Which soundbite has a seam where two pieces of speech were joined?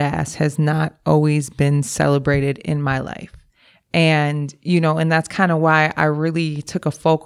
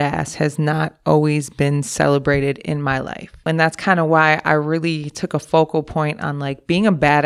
second; 1 cut; at 3.5 s

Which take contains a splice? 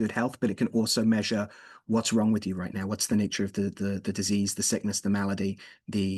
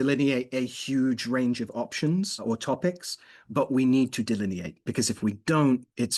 second; 2 cuts; at 2.4 s, 4.8 s

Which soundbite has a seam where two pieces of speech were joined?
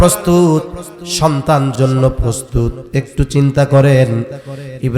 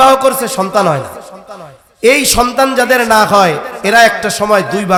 first; 1 cut; at 1.7 s

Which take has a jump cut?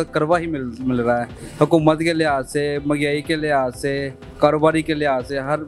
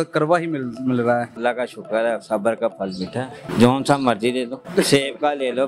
second; 3 cuts; at 1.3 s, 3.4 s, 4.6 s

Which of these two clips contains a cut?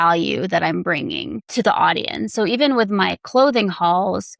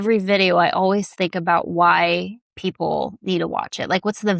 first; 1 cut; at 1.4 s

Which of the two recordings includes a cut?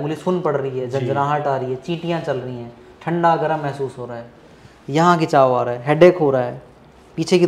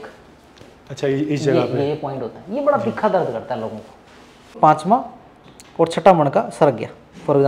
second; 1 cut; at 4.6 s

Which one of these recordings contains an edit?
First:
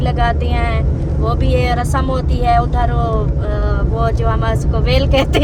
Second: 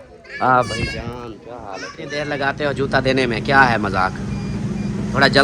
second; 1 cut; at 2.1 s

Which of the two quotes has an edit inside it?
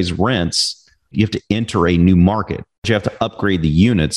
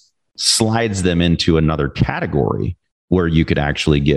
first; 2 cuts; at 1.1 s, 2.8 s

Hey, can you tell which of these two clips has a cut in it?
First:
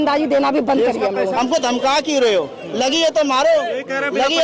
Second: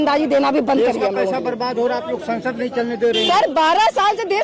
first; 1 cut; at 1.3 s

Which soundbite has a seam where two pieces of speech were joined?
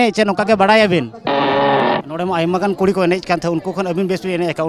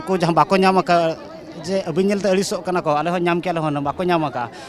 first; 1 cut; at 1.6 s

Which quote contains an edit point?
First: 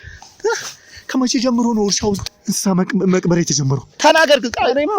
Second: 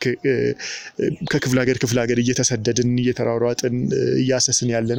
first; 1 cut; at 2.2 s

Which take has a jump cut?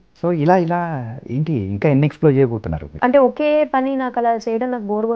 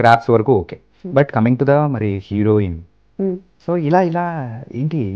first; 1 cut; at 3.0 s

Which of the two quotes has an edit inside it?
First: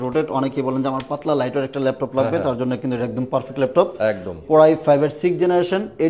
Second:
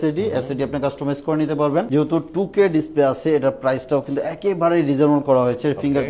second; 1 cut; at 1.9 s

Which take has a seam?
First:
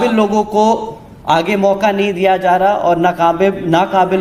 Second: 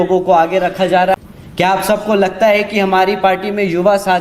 second; 1 cut; at 1.1 s

